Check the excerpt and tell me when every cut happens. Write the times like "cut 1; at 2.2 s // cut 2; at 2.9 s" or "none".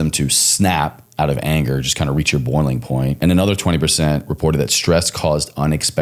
cut 1; at 3.2 s